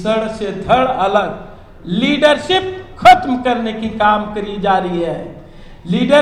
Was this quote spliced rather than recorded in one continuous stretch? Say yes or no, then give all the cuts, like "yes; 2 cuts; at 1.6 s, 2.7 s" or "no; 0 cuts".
no; 0 cuts